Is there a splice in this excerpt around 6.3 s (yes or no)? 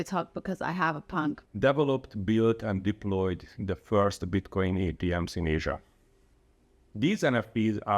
yes